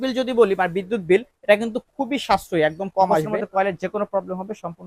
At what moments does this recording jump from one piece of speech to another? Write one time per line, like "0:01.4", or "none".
0:03.4